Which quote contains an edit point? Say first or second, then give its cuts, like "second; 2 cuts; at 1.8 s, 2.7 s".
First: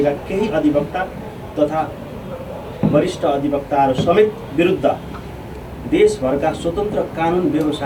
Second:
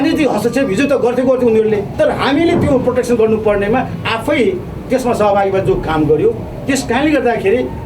second; 1 cut; at 1.9 s